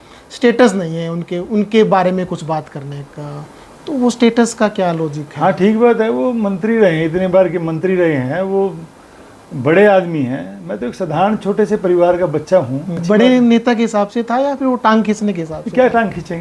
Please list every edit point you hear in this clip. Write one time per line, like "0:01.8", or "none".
0:13.0